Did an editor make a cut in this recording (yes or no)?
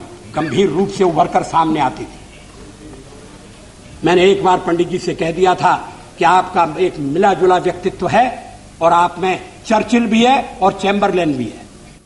no